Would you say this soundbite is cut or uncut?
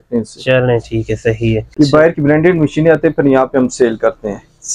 cut